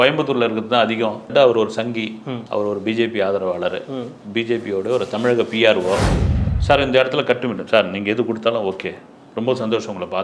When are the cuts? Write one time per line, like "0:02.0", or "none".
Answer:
0:01.3
0:06.2